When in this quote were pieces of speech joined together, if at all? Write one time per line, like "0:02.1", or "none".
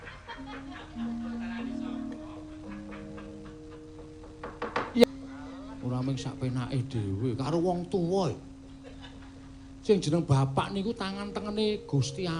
0:05.0

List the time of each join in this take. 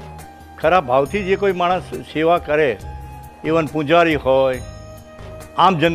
none

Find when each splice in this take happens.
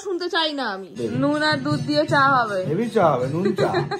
0:00.9

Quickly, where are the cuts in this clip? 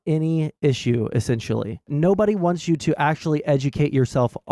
0:01.9

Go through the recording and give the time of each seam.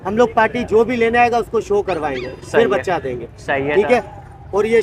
none

